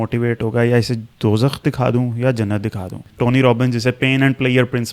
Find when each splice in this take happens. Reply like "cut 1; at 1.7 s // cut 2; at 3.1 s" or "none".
cut 1; at 3.1 s